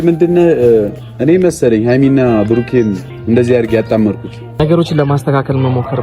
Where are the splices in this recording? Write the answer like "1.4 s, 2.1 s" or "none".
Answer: 4.6 s